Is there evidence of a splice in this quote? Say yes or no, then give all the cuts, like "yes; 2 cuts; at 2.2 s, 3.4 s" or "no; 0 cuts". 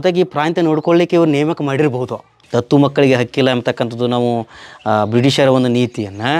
yes; 1 cut; at 2.4 s